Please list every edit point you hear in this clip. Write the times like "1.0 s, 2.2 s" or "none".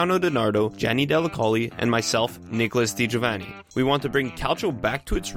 none